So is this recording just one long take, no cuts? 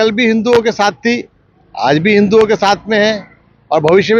yes; 0 cuts

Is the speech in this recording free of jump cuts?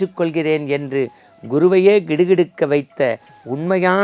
yes; 0 cuts

